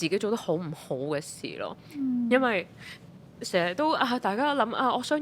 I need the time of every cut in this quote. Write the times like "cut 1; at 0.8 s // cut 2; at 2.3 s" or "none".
none